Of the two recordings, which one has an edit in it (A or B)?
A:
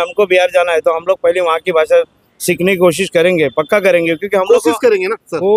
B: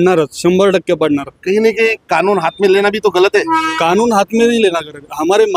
A